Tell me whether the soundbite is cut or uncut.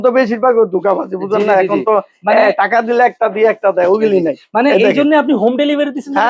uncut